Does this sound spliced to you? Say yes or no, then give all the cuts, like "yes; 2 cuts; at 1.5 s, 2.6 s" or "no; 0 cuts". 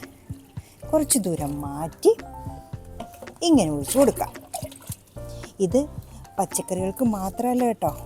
no; 0 cuts